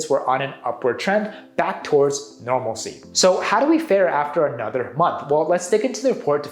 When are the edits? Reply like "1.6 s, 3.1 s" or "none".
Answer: 3.0 s